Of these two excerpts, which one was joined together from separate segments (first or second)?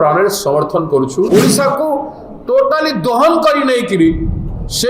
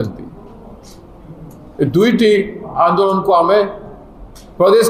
first